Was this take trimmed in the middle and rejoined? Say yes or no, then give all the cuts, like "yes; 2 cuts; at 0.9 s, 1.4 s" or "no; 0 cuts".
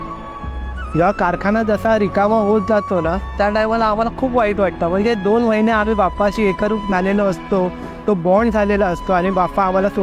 no; 0 cuts